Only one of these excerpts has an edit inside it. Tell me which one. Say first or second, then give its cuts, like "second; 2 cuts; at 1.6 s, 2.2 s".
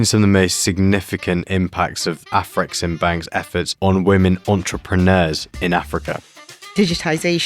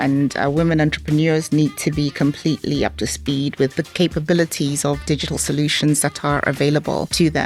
first; 1 cut; at 6.4 s